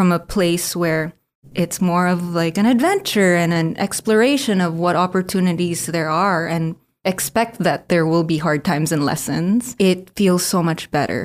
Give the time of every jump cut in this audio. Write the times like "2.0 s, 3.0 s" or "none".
9.8 s